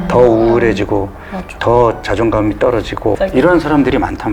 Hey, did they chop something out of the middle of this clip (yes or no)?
yes